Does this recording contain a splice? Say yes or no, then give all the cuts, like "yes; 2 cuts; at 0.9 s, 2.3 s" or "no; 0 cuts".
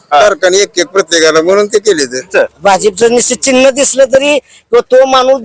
yes; 1 cut; at 2.3 s